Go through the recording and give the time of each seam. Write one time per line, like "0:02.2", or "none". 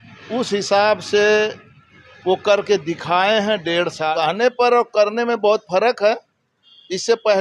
0:04.1